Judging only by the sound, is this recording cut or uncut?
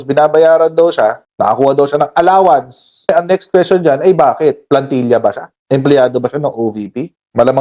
cut